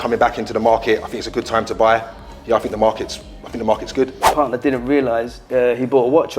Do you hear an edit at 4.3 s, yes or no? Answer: yes